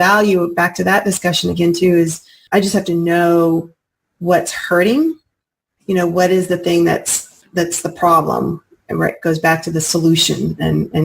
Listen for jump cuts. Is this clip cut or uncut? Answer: cut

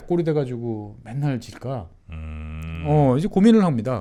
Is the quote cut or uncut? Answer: uncut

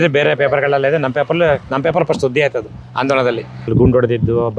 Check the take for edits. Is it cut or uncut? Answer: cut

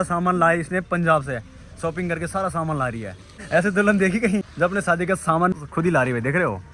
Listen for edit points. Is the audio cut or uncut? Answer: uncut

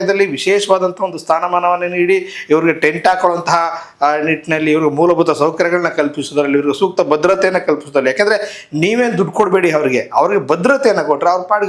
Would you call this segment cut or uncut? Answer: uncut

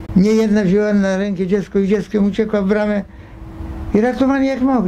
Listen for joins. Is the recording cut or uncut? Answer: uncut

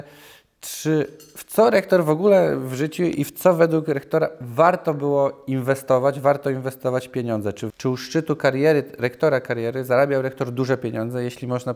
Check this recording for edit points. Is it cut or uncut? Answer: cut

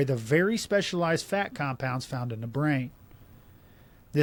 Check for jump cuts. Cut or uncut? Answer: uncut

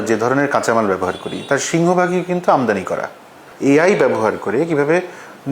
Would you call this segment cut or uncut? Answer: cut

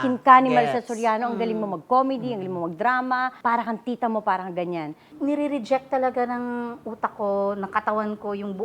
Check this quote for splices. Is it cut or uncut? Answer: cut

